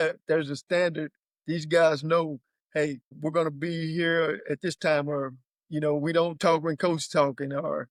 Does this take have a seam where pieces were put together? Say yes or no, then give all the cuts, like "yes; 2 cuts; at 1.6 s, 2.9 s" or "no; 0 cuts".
no; 0 cuts